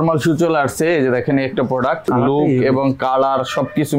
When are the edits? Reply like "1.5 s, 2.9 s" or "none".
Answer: 2.0 s